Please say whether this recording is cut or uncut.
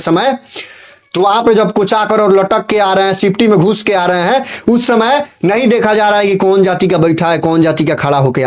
uncut